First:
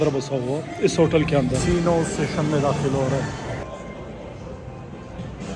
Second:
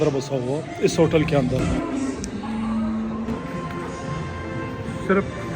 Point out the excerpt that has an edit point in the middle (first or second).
first